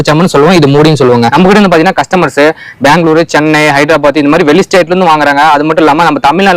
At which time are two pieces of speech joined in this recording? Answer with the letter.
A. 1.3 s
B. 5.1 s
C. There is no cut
A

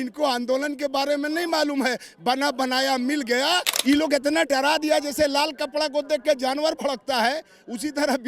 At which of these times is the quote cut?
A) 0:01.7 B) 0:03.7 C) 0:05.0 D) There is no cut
B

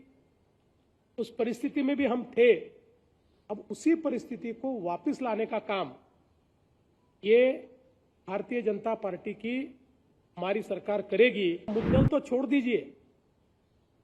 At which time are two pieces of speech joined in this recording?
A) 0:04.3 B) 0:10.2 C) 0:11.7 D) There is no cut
C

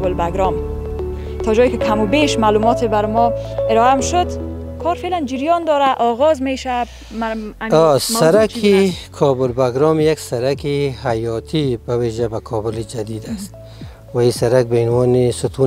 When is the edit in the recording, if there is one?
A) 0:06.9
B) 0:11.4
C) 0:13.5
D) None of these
D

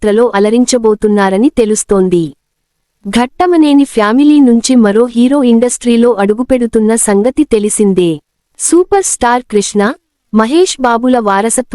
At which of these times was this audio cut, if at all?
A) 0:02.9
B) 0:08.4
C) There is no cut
A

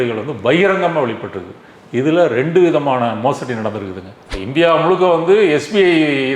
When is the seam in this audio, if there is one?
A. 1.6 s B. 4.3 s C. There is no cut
B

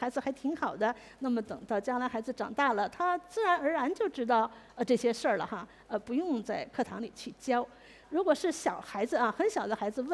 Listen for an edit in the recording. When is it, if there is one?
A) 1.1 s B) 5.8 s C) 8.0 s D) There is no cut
C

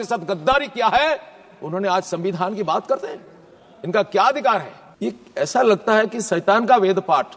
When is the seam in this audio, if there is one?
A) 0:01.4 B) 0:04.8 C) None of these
B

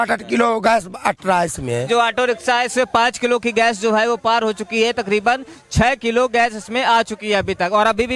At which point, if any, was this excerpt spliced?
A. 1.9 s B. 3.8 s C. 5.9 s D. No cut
A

